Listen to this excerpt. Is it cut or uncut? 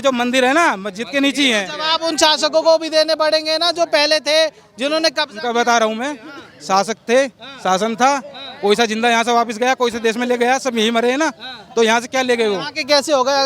uncut